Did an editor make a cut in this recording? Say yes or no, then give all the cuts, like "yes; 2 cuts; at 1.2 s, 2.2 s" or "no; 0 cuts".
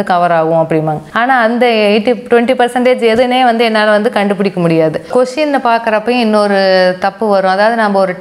no; 0 cuts